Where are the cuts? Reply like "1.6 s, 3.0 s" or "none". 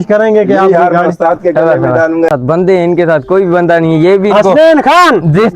2.3 s